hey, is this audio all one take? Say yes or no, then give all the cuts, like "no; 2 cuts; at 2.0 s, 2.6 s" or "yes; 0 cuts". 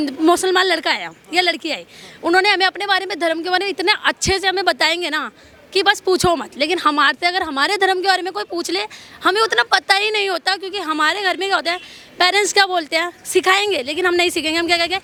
yes; 0 cuts